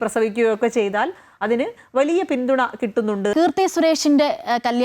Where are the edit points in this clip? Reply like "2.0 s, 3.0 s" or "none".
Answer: 3.3 s